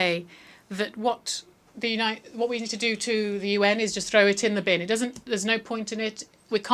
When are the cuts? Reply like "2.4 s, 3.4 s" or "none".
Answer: none